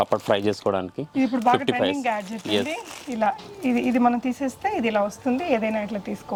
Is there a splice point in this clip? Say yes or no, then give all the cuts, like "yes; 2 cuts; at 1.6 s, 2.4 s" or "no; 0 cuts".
no; 0 cuts